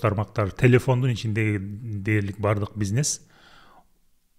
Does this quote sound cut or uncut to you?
uncut